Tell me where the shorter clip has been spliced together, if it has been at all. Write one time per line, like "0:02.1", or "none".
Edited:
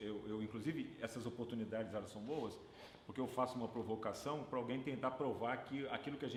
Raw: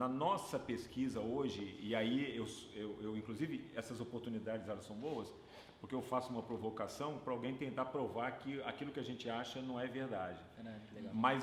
none